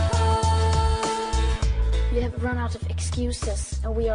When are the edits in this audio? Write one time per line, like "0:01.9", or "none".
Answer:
0:01.5

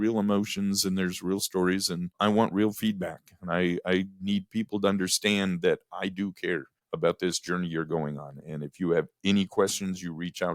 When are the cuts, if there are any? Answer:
0:02.1
0:06.8

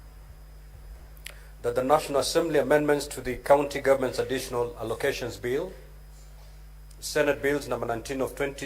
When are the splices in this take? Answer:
0:04.5

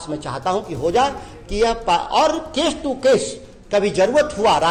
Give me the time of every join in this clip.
none

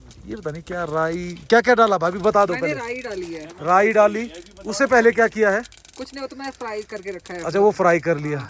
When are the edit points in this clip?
none

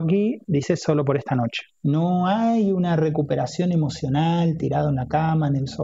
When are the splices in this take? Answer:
0:01.7

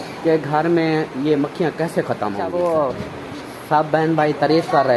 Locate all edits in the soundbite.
0:02.4

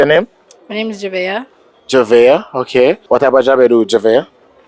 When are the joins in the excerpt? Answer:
0:03.0

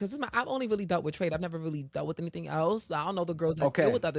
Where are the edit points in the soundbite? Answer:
none

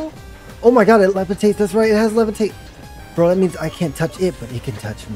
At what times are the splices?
none

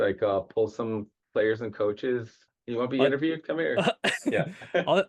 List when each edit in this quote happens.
0:01.2
0:02.5

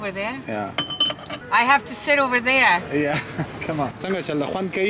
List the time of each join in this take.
0:01.3
0:04.0

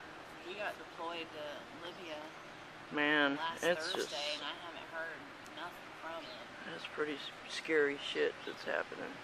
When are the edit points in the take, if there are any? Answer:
0:08.0

